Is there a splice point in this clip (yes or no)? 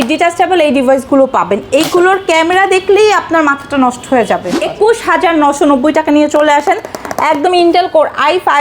yes